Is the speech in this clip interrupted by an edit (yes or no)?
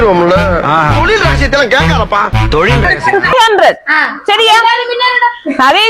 yes